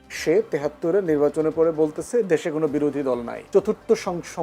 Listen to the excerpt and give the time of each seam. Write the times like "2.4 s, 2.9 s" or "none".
3.4 s